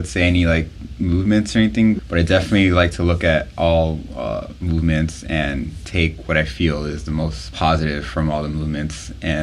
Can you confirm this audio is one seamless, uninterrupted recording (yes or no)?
no